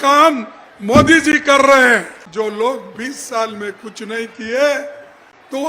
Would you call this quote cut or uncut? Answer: cut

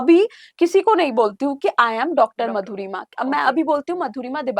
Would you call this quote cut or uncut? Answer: uncut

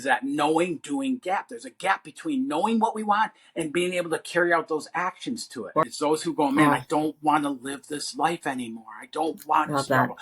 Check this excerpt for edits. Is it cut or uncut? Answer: cut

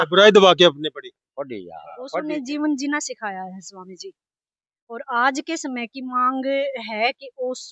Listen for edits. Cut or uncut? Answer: cut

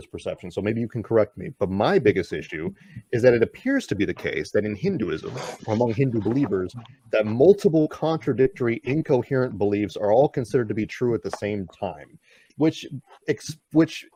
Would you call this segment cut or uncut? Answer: uncut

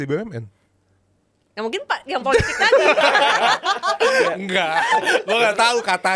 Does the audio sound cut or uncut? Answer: uncut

